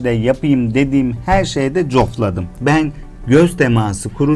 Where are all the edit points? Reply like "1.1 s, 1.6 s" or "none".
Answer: none